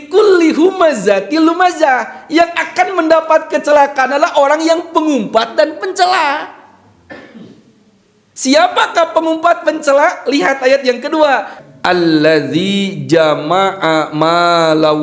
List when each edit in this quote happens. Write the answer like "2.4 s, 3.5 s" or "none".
11.6 s